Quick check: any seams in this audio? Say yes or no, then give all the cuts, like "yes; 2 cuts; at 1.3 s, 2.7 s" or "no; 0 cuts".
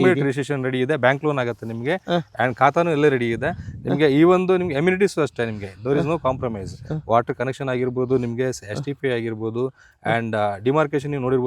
no; 0 cuts